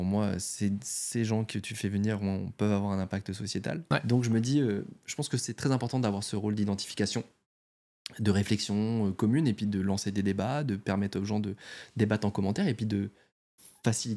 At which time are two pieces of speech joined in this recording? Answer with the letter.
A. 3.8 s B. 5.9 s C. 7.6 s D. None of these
A